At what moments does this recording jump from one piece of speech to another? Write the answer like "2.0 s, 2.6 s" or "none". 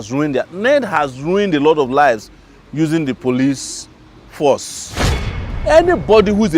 5.3 s